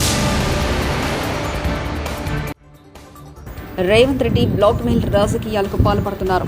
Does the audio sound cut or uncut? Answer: uncut